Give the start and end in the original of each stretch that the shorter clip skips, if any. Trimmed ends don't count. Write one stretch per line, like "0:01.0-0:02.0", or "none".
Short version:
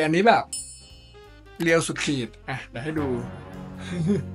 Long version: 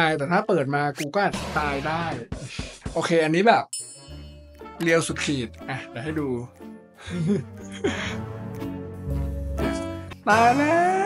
none